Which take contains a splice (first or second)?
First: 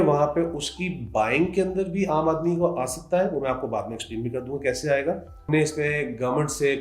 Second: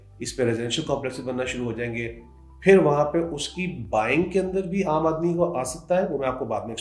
first